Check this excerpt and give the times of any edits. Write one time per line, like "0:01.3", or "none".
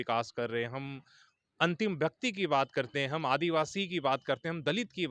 none